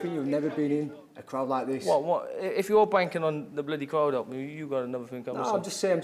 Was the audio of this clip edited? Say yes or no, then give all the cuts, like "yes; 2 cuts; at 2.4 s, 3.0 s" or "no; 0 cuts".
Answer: no; 0 cuts